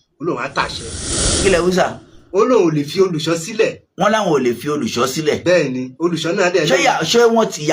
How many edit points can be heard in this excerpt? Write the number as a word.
one